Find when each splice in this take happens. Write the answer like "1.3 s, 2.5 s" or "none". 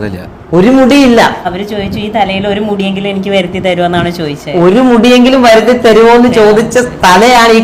1.2 s